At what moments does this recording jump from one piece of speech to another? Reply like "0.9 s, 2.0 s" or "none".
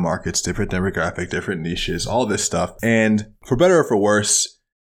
2.7 s